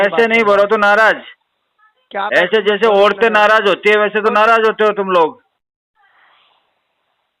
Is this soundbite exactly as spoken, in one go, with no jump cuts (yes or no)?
yes